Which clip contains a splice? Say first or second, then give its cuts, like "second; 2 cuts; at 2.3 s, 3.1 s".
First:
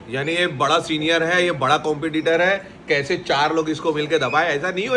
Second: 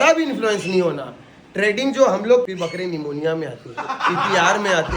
second; 1 cut; at 2.4 s